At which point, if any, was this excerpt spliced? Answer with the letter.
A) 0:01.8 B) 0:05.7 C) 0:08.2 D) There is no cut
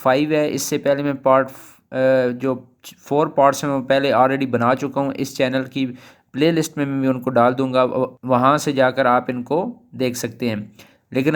C